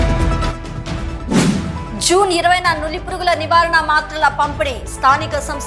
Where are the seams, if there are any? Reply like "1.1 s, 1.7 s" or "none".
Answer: 1.7 s